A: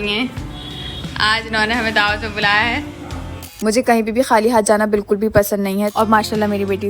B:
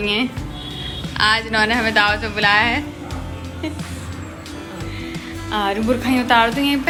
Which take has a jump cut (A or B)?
A